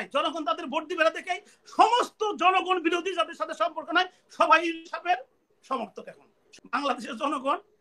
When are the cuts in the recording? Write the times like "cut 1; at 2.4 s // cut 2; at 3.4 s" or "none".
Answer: cut 1; at 6.4 s